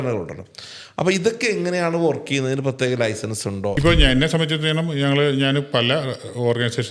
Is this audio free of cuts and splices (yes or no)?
no